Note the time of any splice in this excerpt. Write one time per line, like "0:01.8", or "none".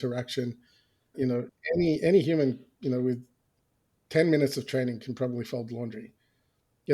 0:01.1